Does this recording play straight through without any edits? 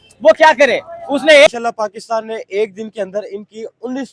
no; 1 cut; at 1.5 s

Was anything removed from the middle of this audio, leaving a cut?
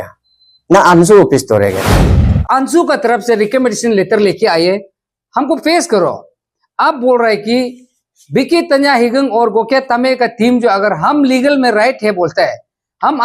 yes; 1 cut; at 2.2 s

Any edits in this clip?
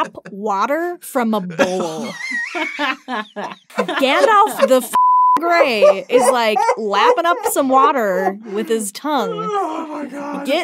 yes; 1 cut; at 3.6 s

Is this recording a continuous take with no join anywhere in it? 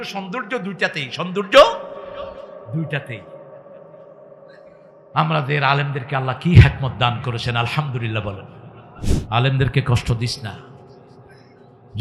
no; 1 cut; at 9.1 s

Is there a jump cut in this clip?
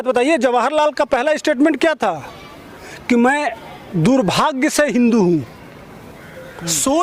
no; 0 cuts

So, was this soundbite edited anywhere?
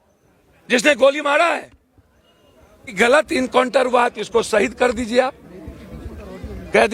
yes; 1 cut; at 2.9 s

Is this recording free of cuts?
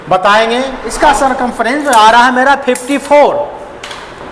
no; 1 cut; at 0.9 s

